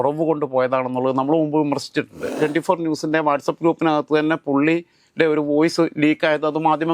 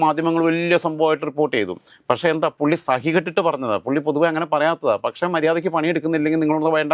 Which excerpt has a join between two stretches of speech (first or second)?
first